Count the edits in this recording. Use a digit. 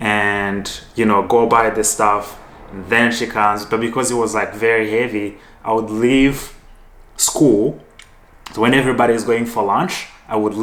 0